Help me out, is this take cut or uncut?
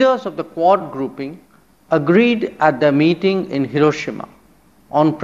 uncut